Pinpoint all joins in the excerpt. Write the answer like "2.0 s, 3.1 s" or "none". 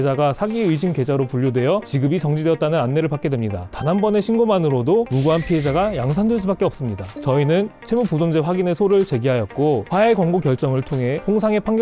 3.7 s, 7.1 s